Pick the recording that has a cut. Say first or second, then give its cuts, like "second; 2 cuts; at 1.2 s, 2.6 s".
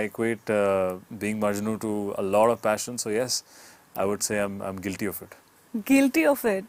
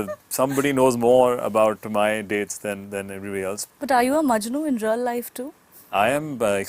second; 1 cut; at 3.6 s